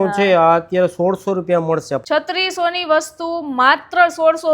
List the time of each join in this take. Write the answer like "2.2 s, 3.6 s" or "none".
2.0 s